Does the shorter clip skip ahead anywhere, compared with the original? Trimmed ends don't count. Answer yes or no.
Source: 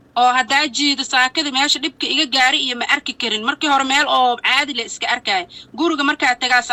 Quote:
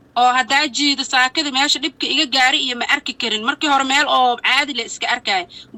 no